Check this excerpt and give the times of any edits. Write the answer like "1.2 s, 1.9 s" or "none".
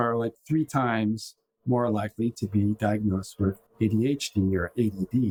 none